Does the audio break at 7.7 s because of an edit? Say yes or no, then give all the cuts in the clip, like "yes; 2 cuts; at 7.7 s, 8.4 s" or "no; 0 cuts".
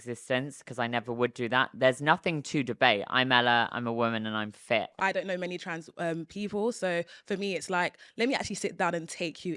no; 1 cut; at 4.9 s